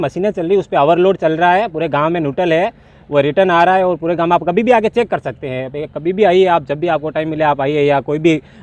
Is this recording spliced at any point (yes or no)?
no